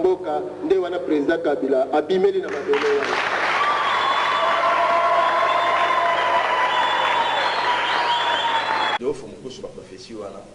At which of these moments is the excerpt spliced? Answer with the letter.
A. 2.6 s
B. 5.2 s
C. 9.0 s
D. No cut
C